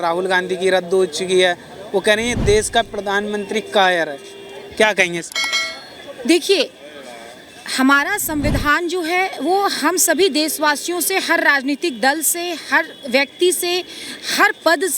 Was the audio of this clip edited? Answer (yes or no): no